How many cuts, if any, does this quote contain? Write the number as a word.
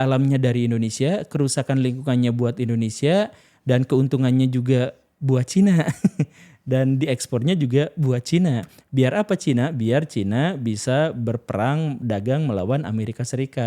zero